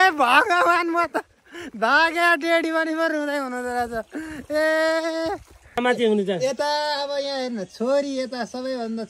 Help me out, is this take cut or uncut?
cut